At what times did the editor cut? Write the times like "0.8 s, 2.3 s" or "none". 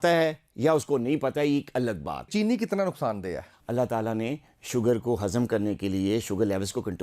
2.3 s, 3.5 s

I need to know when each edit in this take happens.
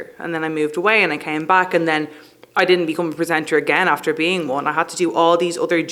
none

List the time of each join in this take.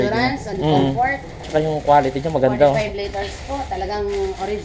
1.3 s

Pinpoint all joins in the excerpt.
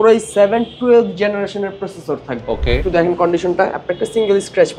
2.8 s

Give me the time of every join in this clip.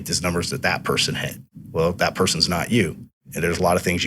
1.4 s, 3.2 s

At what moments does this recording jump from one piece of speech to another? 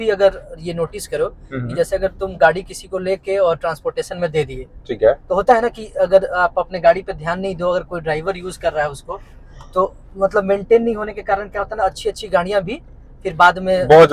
none

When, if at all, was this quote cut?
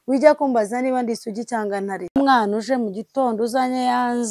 2.2 s

